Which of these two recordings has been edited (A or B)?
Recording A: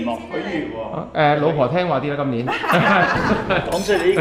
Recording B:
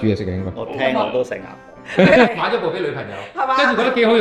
B